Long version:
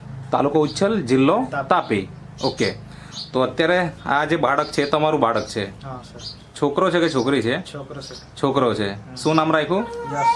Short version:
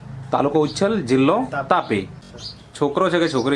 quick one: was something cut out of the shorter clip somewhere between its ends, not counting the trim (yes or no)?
yes